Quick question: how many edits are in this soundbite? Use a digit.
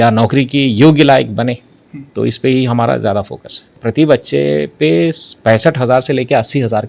1